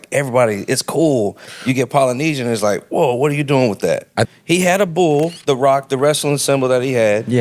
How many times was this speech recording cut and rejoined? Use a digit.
1